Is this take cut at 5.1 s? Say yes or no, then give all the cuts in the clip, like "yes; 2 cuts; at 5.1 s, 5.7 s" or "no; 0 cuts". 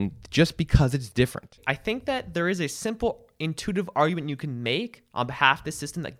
no; 1 cut; at 1.6 s